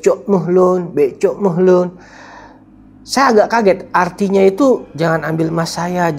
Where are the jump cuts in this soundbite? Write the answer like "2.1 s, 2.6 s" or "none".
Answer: none